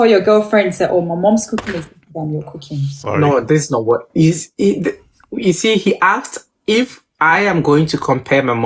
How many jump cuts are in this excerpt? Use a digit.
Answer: 0